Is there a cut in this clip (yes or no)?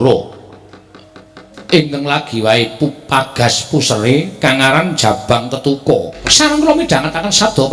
yes